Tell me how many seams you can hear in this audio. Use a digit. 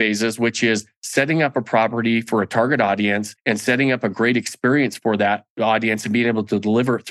1